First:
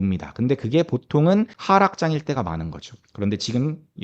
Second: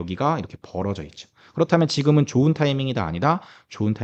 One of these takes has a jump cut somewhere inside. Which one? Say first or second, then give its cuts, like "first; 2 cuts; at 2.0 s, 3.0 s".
first; 1 cut; at 1.6 s